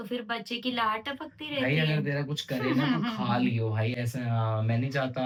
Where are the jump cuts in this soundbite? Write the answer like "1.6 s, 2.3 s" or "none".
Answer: none